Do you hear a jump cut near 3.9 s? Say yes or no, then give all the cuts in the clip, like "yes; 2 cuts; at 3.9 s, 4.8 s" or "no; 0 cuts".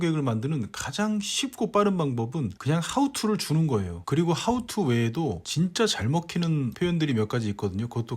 yes; 1 cut; at 3.9 s